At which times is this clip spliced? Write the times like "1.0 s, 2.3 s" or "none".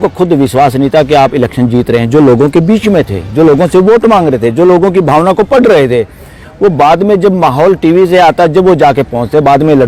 none